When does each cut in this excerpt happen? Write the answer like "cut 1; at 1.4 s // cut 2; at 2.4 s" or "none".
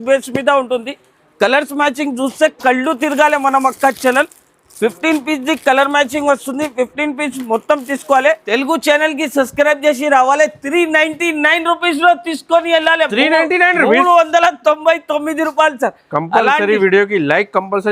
cut 1; at 8.4 s